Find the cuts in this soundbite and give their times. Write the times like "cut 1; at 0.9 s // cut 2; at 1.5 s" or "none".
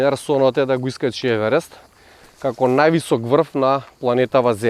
none